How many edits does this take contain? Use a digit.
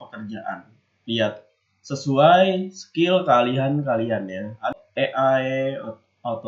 1